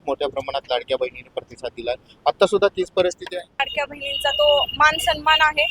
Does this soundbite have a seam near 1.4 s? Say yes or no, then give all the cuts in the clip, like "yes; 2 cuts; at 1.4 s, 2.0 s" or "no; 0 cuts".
no; 1 cut; at 3.7 s